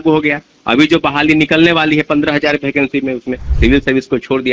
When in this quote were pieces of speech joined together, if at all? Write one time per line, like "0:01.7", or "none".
0:03.4